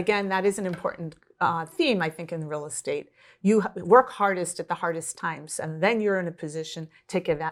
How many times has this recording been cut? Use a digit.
0